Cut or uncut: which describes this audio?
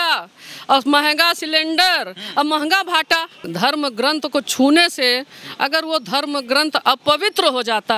cut